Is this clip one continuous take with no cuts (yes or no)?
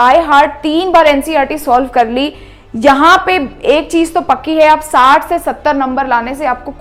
yes